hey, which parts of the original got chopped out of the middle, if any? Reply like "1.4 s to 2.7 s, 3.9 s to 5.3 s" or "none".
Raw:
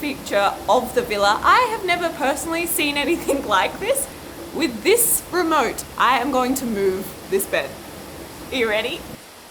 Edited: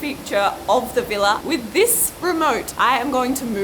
1.4 s to 4.5 s, 5.8 s to 5.9 s